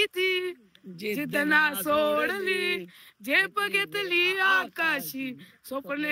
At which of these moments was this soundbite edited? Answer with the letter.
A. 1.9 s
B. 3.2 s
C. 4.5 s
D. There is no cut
D